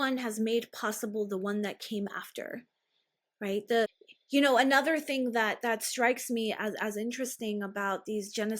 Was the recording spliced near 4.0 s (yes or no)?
yes